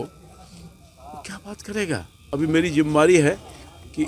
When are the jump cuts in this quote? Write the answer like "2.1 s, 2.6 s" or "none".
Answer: 2.1 s

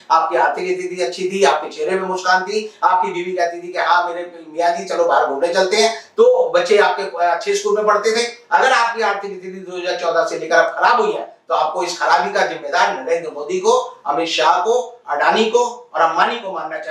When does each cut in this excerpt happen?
none

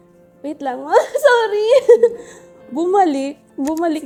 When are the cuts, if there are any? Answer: none

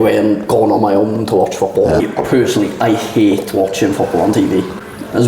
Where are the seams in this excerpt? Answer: 2.0 s

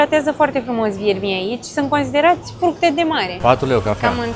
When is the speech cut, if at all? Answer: 3.3 s

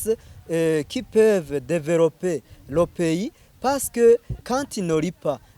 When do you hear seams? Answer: 4.4 s

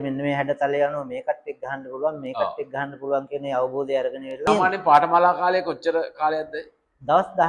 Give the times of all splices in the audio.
4.5 s

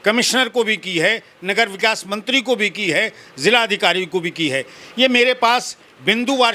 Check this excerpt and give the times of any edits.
none

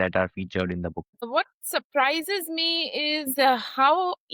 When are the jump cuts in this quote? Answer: 1.2 s

